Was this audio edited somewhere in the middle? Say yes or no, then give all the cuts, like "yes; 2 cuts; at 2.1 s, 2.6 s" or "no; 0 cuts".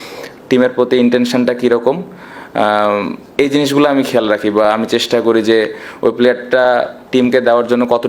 no; 0 cuts